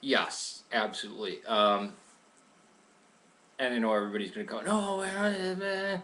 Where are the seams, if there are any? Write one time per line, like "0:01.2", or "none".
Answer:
none